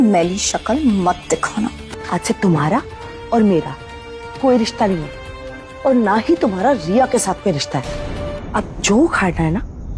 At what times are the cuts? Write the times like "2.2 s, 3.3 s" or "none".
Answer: 1.9 s